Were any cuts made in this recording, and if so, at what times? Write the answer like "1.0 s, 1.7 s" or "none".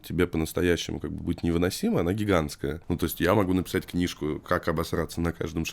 2.8 s

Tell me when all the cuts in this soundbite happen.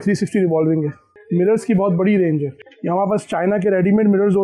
1.1 s, 2.7 s

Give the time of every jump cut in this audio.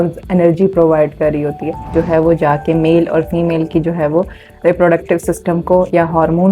1.9 s

